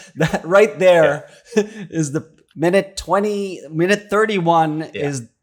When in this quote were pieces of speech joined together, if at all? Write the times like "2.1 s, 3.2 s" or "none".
none